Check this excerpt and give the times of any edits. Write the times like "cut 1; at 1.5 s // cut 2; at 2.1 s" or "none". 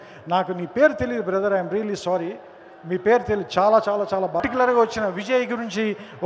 cut 1; at 4.4 s